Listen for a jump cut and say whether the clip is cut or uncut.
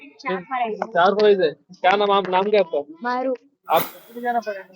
cut